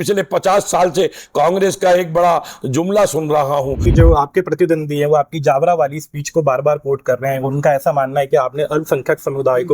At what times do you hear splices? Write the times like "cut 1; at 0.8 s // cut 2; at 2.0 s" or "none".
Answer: cut 1; at 3.8 s